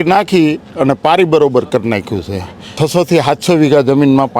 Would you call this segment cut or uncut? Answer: cut